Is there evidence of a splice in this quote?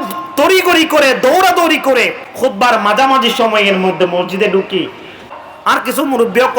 yes; 2 cuts; at 2.2 s, 5.2 s

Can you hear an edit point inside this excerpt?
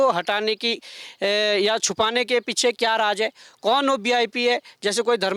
no; 0 cuts

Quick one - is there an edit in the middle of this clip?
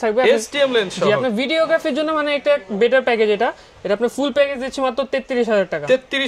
no; 0 cuts

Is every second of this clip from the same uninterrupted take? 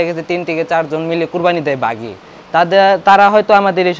yes; 0 cuts

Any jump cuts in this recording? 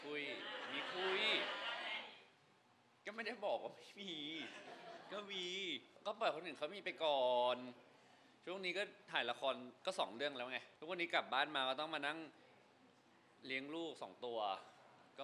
yes; 2 cuts; at 5.9 s, 10.7 s

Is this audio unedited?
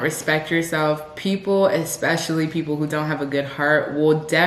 yes; 0 cuts

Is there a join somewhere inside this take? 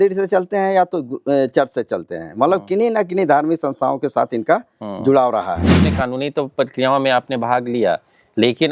yes; 1 cut; at 5.9 s

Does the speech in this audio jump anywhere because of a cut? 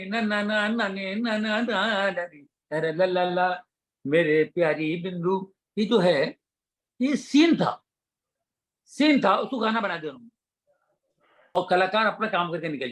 yes; 1 cut; at 11.6 s

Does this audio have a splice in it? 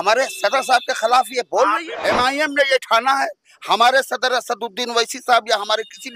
yes; 1 cut; at 1.9 s

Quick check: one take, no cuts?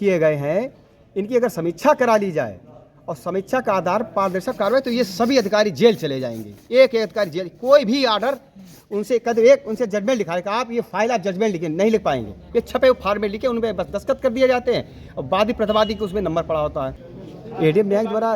no; 1 cut; at 17.1 s

